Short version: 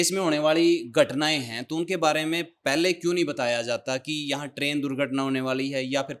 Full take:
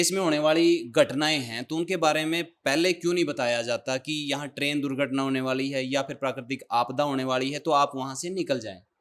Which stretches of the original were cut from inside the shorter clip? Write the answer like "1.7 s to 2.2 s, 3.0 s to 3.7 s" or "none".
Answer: none